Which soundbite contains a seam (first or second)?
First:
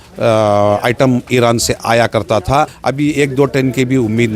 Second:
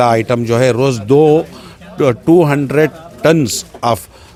first